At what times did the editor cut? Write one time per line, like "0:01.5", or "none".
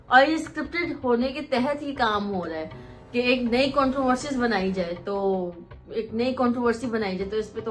none

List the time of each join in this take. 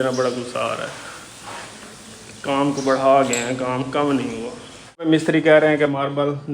0:05.1

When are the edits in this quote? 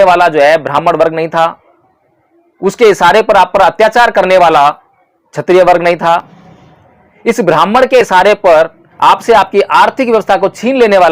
0:08.8

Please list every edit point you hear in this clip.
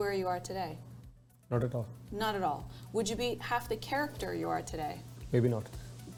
none

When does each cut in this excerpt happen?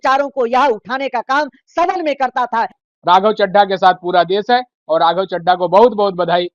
0:02.8

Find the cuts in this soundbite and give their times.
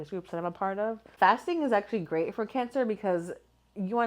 0:01.1

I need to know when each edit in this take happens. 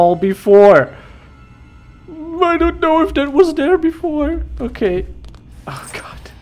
none

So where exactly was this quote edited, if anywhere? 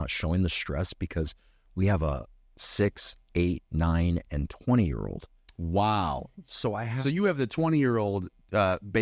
none

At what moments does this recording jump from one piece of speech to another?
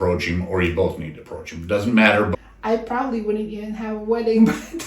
0:02.3

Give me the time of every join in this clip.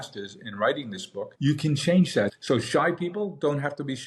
0:01.3
0:02.3

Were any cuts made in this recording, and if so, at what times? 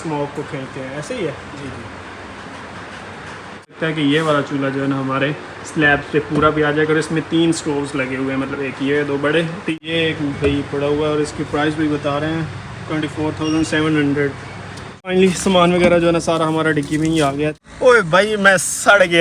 0:03.8
0:09.7
0:15.1
0:17.6

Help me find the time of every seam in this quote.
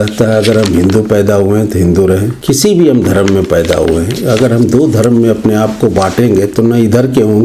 0:02.3

